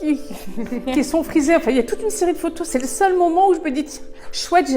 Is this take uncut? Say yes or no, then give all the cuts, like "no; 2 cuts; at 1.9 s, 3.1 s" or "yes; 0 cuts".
no; 1 cut; at 0.9 s